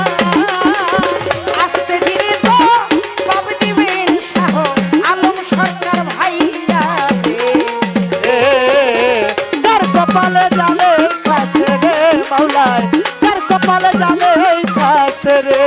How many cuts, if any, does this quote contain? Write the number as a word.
zero